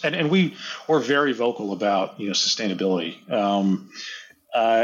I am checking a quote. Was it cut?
no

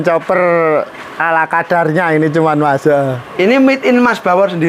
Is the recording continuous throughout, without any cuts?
yes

